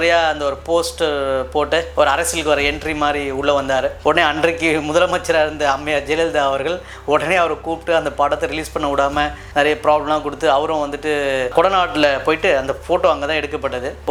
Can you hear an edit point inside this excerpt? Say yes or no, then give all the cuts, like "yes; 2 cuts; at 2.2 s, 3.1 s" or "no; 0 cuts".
no; 0 cuts